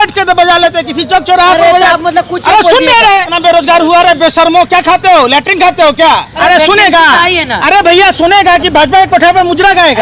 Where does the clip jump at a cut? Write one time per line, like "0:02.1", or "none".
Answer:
0:03.3
0:06.3